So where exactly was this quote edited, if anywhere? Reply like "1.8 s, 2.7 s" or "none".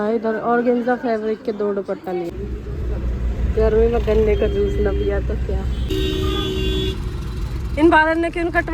2.3 s, 5.9 s